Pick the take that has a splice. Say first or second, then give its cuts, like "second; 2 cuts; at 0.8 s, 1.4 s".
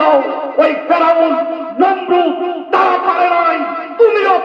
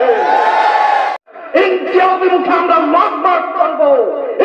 second; 1 cut; at 1.3 s